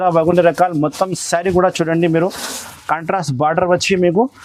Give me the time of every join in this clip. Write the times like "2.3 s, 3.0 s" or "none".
none